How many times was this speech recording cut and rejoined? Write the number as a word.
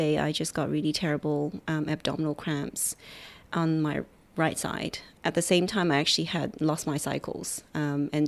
one